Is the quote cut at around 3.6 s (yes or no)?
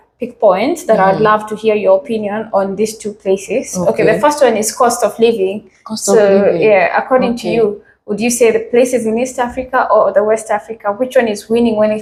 no